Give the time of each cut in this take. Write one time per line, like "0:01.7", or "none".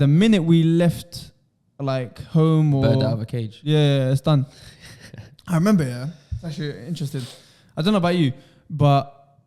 none